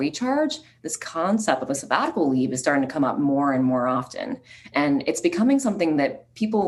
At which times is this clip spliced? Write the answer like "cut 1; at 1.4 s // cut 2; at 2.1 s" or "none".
none